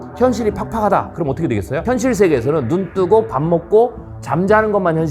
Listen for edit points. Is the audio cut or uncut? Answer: cut